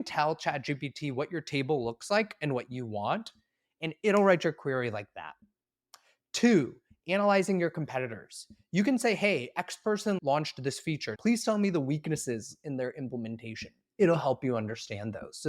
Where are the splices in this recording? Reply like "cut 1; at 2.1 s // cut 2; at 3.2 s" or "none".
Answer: cut 1; at 10.2 s // cut 2; at 11.1 s